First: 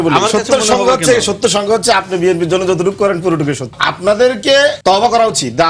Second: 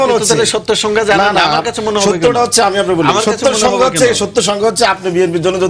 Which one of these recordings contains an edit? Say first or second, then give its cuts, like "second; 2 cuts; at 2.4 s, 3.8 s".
first; 2 cuts; at 3.7 s, 4.8 s